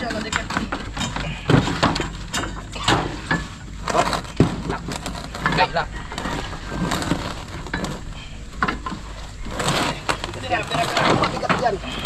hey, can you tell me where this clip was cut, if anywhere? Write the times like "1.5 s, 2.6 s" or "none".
none

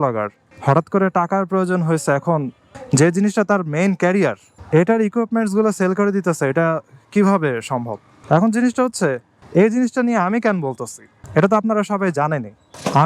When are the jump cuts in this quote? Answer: none

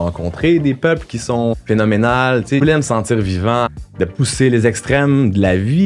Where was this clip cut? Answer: 1.5 s, 2.6 s, 3.8 s

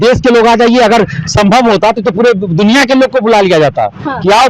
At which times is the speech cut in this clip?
none

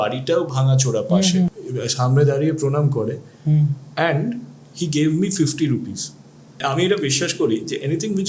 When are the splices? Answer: 1.5 s, 6.6 s

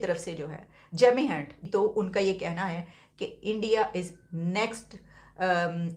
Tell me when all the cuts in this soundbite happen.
1.6 s

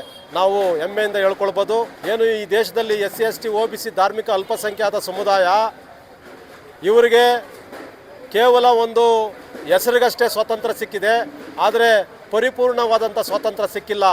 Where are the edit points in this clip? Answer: 2.0 s

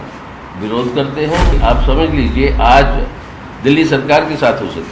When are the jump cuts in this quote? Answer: 1.6 s

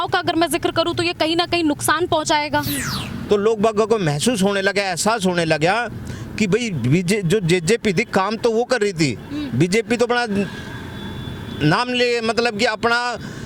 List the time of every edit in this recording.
2.8 s

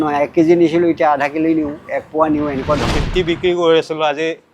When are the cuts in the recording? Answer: 2.8 s

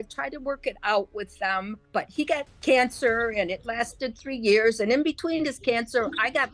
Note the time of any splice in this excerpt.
2.3 s

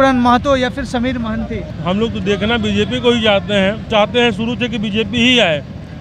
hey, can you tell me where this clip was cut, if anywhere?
1.6 s, 3.8 s

